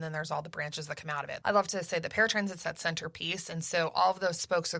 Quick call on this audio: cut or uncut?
cut